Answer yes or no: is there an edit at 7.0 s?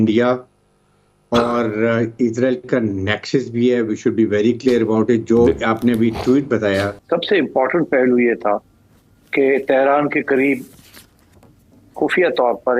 yes